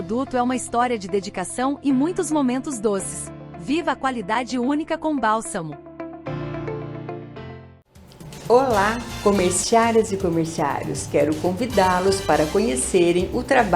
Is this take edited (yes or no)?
yes